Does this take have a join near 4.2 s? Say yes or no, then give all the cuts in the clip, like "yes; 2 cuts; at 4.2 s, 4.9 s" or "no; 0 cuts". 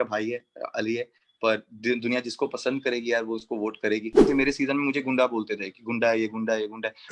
yes; 1 cut; at 4.2 s